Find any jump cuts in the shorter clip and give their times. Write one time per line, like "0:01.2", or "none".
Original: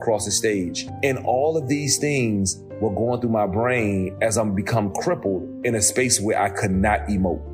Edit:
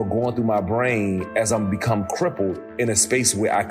none